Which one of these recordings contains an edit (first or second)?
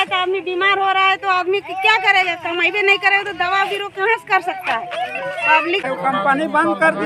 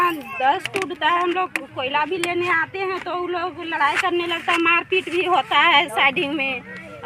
first